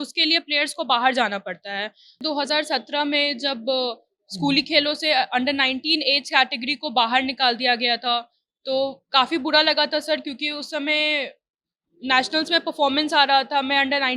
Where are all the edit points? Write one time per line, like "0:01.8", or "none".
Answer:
0:02.2